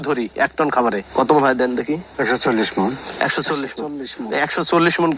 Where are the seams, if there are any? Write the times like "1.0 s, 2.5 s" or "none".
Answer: none